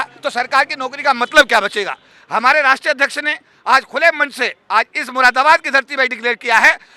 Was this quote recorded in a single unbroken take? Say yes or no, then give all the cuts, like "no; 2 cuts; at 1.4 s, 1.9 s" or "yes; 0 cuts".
yes; 0 cuts